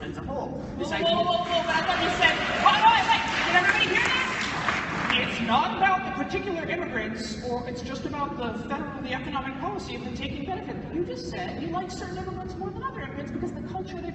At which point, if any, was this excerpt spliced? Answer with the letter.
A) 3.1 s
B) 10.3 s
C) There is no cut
C